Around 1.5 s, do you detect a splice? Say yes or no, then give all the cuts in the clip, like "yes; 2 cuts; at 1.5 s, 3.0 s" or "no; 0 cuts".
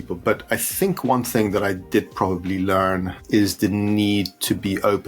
no; 1 cut; at 3.1 s